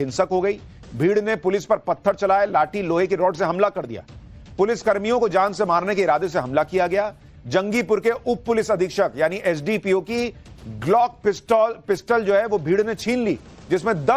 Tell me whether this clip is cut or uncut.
uncut